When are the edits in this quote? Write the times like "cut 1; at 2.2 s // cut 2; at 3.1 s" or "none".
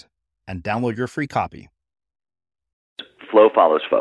cut 1; at 3.1 s